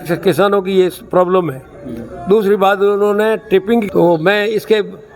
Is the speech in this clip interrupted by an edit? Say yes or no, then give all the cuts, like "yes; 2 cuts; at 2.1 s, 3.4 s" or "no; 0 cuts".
yes; 1 cut; at 3.9 s